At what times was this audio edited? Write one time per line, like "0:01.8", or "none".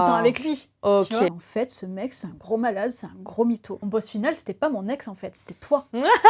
0:01.4
0:03.8